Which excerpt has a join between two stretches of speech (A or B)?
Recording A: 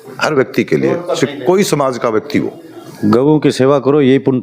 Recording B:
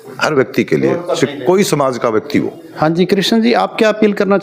A